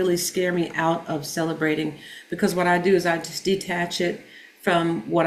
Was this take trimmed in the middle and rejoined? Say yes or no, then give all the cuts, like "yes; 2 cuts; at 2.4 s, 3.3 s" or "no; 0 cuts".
no; 0 cuts